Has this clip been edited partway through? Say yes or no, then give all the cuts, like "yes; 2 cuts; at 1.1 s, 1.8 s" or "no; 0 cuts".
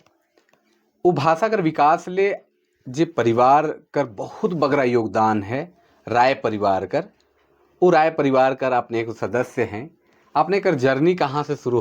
no; 0 cuts